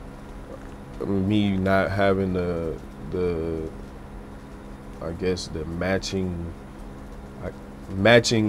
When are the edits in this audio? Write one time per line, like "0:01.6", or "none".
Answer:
none

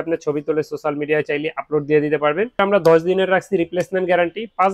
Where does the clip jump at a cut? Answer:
0:02.5

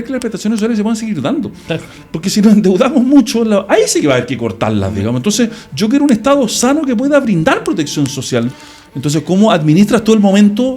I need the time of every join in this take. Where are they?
0:08.5

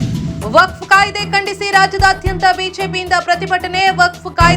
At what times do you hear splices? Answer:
none

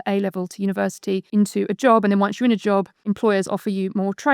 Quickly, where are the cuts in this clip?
0:01.3
0:03.1

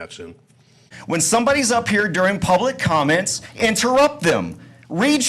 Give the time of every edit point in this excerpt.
0:00.9

